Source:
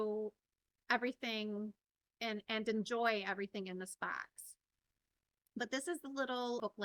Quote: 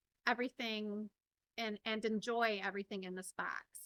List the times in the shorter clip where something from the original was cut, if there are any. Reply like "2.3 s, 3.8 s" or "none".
none